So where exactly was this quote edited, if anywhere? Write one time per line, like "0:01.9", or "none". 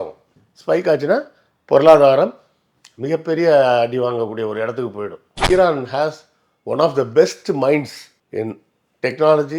0:05.4